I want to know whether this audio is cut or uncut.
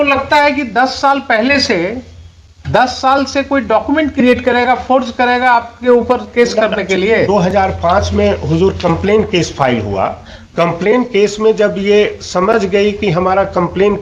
uncut